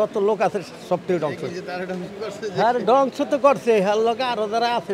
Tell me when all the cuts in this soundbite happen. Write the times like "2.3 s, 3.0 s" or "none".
none